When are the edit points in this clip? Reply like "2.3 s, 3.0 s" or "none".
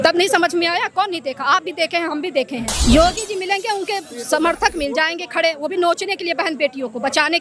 2.7 s